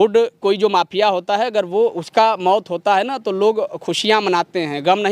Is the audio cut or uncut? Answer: uncut